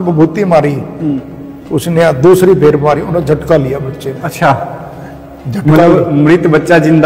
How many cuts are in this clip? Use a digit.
0